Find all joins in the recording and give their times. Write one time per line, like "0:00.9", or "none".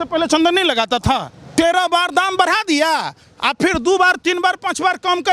0:01.4